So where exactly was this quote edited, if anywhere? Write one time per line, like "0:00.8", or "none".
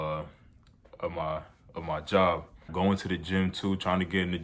0:02.6